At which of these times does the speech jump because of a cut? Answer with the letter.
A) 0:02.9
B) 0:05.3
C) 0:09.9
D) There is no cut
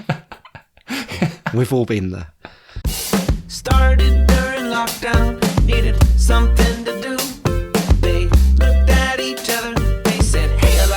A